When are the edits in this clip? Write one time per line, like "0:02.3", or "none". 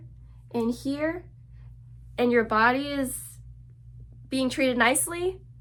none